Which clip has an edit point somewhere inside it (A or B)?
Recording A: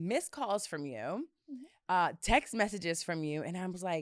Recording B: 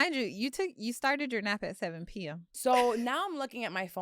B